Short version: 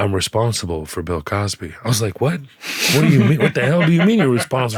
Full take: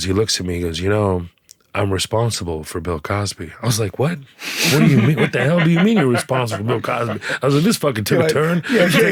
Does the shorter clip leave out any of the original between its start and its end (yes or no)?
no